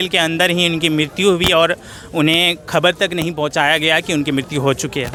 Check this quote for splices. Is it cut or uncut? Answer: uncut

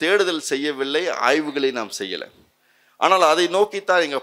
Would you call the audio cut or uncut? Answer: uncut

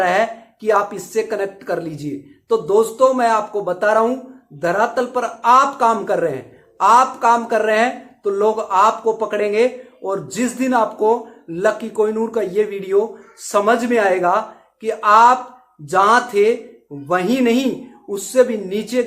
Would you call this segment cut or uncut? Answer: uncut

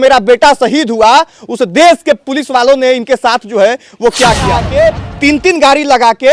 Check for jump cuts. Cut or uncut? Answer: cut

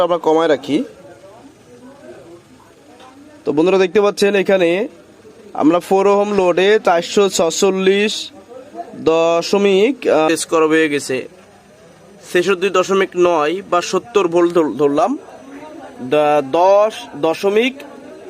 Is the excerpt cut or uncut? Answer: cut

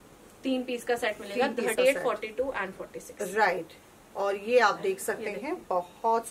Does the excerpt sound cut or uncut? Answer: uncut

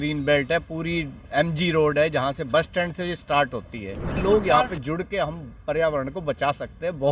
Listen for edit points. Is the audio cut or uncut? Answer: cut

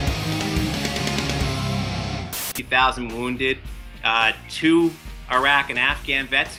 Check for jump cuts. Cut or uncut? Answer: uncut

